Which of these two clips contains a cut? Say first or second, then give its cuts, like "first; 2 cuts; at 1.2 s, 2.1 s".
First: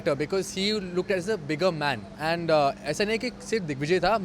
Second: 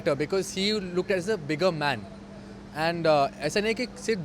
first; 1 cut; at 2.1 s